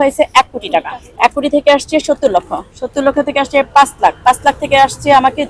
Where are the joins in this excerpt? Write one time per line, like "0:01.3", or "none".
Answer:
0:01.0